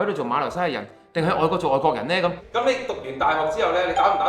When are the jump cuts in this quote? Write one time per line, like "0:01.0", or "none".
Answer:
0:02.4